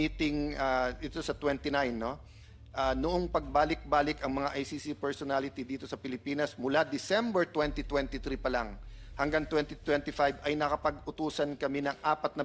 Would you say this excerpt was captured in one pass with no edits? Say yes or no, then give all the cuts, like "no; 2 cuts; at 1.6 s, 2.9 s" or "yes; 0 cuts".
yes; 0 cuts